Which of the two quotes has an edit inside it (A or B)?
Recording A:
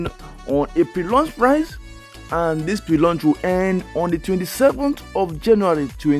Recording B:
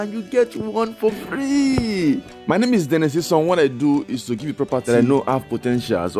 B